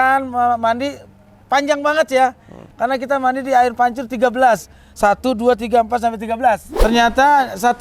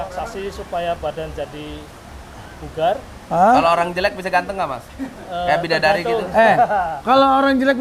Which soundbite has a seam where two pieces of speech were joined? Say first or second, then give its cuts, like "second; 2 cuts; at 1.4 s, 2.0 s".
first; 1 cut; at 6.7 s